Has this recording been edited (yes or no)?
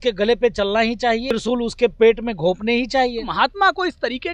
yes